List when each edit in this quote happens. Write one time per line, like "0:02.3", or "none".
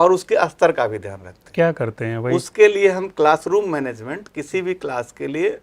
none